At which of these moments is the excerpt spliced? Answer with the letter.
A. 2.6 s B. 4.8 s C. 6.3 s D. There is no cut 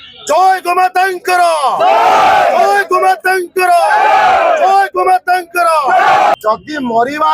C